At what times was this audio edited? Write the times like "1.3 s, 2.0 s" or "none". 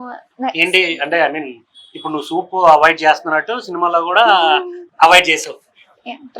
4.8 s

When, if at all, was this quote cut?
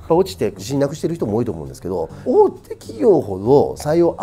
none

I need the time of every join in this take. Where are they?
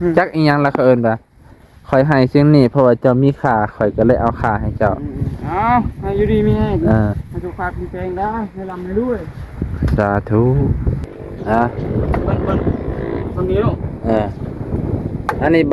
11.1 s

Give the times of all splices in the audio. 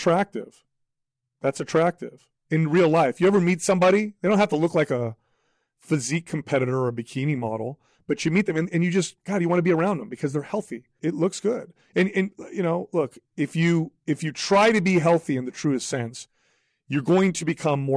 10.8 s

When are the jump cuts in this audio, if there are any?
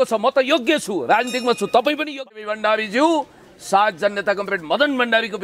2.2 s

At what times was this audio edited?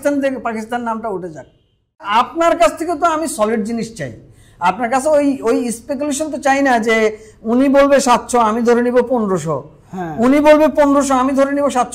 2.0 s

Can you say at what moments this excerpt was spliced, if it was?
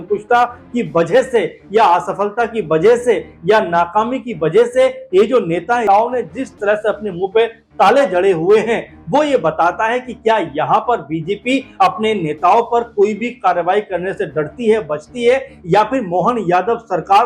5.8 s

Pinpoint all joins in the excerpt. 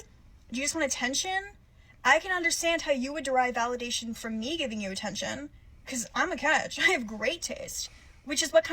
1.5 s

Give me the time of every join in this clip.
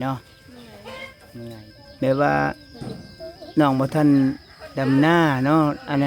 1.6 s

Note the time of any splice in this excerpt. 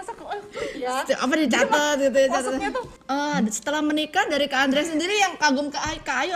2.9 s

